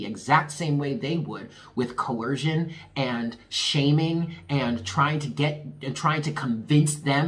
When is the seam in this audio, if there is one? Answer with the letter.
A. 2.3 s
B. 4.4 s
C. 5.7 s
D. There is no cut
D